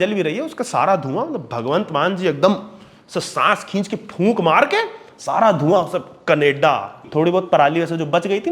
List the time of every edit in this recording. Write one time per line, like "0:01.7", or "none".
0:07.0